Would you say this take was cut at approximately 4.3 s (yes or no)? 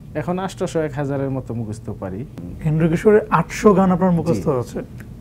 no